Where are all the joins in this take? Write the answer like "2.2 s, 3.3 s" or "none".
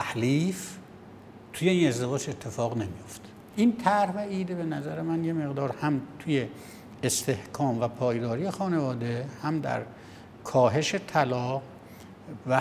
3.4 s

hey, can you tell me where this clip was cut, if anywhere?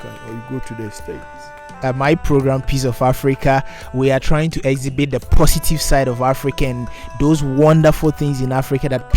1.7 s

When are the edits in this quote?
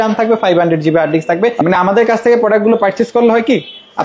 1.6 s

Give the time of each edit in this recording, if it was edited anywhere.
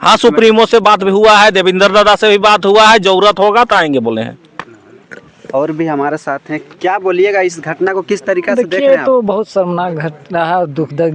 none

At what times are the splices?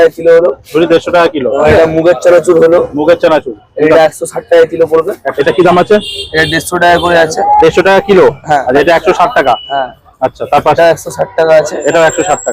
1.6 s, 5.3 s, 8.7 s, 10.8 s

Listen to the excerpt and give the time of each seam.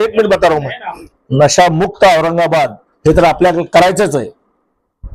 1.0 s

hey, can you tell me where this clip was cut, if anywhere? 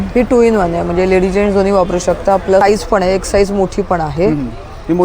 2.6 s

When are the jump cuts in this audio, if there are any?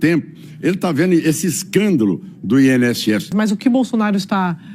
3.3 s

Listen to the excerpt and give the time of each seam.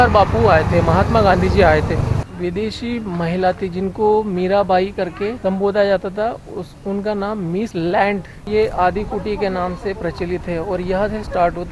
2.2 s, 5.4 s, 7.7 s, 8.5 s

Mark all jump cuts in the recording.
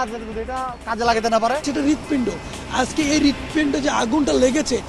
1.6 s

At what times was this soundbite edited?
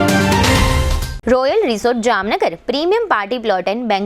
1.1 s

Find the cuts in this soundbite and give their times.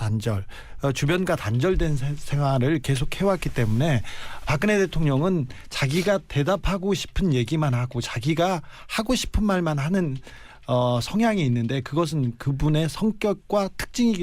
3.4 s

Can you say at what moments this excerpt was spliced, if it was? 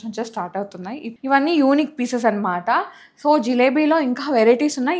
1.1 s

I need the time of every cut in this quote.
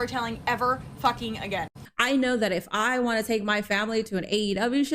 1.8 s

